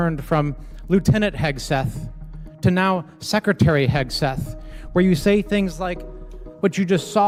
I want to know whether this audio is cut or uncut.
uncut